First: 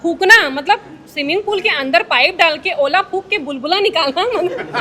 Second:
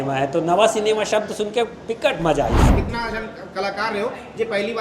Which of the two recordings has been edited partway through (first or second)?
second